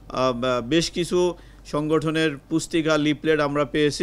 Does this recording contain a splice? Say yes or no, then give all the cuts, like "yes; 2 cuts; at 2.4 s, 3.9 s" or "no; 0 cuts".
no; 0 cuts